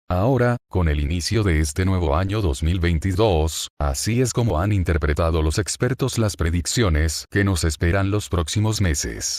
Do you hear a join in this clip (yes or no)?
no